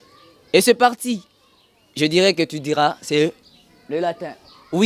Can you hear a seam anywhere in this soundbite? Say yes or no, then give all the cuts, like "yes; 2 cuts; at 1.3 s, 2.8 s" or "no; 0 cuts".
no; 0 cuts